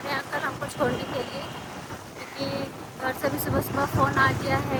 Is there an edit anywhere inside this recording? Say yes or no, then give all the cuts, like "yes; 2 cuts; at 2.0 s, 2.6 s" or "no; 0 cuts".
no; 0 cuts